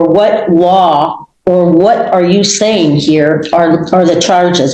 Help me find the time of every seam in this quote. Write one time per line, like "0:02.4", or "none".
none